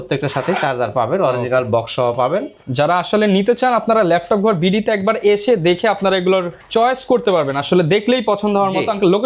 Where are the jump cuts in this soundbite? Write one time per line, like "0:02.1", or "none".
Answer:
none

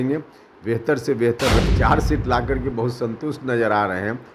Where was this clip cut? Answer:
0:01.7

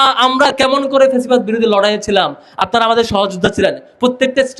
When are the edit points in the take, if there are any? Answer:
none

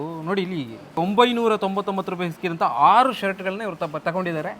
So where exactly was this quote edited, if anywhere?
0:01.0

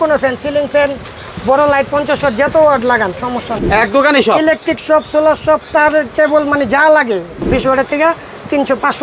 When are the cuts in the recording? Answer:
0:03.5
0:07.4

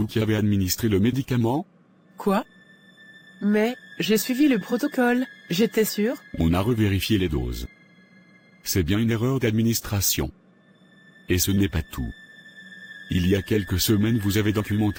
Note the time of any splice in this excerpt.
none

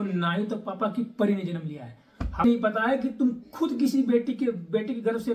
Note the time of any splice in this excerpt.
0:02.4

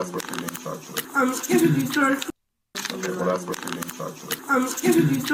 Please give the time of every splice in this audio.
0:01.0
0:02.6
0:04.3

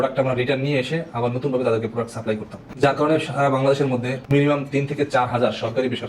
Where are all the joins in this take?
0:02.6

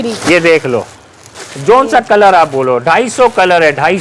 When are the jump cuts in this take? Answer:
none

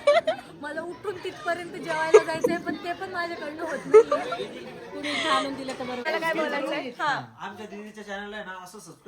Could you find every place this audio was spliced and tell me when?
0:06.0

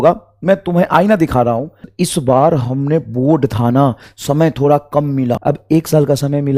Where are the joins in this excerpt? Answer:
0:01.8
0:05.4

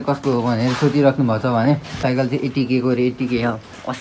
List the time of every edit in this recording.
0:02.0

